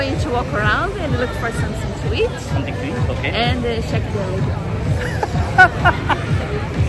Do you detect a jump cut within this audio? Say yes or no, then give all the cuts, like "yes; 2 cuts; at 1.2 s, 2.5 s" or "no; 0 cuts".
no; 0 cuts